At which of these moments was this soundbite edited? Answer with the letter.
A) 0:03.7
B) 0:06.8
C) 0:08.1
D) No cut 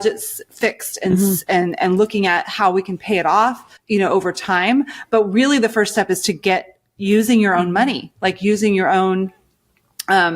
A